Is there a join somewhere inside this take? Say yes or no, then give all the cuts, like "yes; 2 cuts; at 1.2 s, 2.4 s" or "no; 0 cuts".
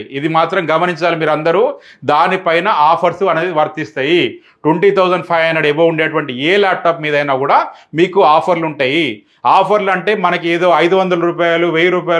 no; 0 cuts